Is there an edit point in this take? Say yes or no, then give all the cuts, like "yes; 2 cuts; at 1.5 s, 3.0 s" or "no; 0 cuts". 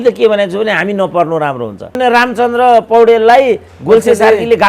yes; 1 cut; at 2.0 s